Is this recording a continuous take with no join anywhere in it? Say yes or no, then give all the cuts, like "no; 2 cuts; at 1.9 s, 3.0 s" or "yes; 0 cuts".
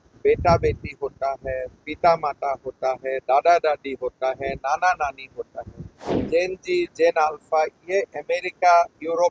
no; 1 cut; at 6.2 s